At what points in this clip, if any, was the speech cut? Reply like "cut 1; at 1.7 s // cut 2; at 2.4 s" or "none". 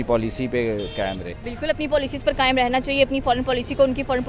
cut 1; at 1.3 s

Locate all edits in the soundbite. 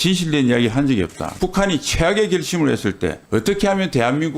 cut 1; at 1.3 s

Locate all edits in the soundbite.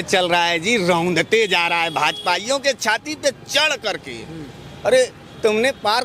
none

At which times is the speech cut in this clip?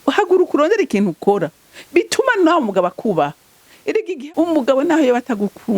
cut 1; at 4.1 s

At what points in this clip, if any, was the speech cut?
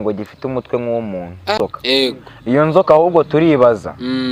cut 1; at 1.6 s

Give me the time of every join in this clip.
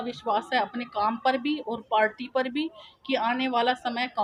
none

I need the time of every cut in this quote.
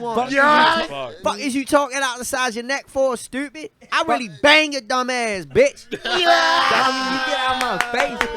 cut 1; at 1.2 s

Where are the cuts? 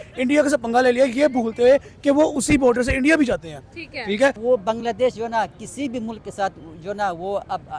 cut 1; at 4.4 s

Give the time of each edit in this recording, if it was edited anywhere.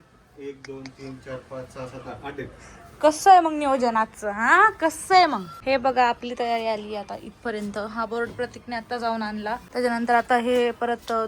cut 1; at 5.5 s // cut 2; at 9.6 s

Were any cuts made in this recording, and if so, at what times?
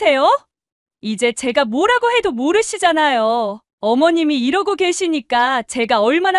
cut 1; at 3.6 s

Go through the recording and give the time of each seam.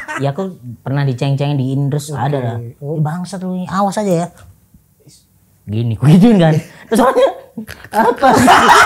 none

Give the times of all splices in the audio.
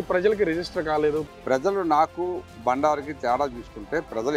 cut 1; at 1.3 s // cut 2; at 2.5 s

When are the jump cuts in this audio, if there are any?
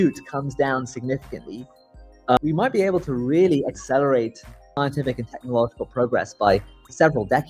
none

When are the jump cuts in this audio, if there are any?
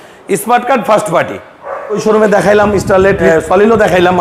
cut 1; at 2.0 s // cut 2; at 3.3 s

